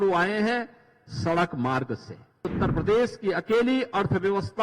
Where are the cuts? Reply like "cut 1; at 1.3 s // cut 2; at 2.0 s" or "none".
cut 1; at 2.5 s